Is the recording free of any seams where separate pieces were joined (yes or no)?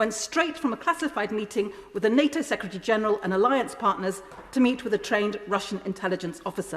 yes